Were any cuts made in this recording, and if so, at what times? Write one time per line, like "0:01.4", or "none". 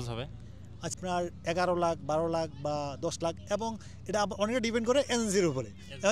0:00.9